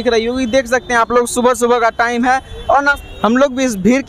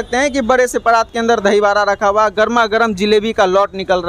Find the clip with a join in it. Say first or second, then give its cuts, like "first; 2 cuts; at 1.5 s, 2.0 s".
first; 1 cut; at 3.0 s